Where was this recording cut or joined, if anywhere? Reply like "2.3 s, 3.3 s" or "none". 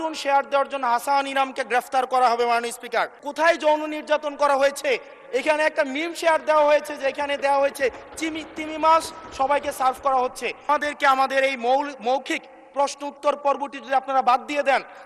3.2 s, 10.7 s